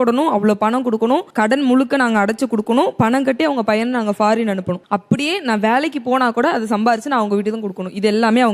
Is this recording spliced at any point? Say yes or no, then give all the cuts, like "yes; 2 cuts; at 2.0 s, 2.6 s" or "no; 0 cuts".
no; 0 cuts